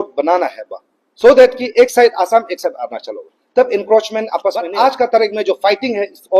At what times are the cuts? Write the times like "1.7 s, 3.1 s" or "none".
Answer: 4.6 s